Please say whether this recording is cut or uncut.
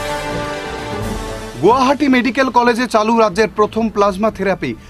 cut